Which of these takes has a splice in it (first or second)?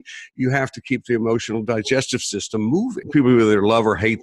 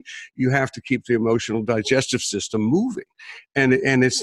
first